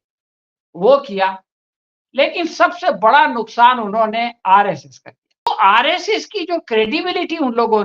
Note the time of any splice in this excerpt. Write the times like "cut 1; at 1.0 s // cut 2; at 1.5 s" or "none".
cut 1; at 5.5 s